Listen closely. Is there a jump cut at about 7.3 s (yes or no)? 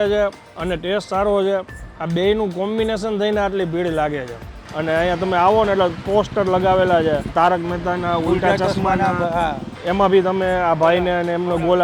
yes